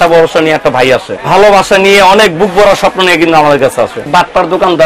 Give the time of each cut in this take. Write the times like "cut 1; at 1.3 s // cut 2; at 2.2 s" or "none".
cut 1; at 1.1 s // cut 2; at 4.1 s